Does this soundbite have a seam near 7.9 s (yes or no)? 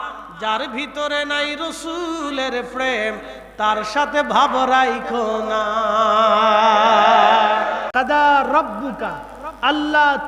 yes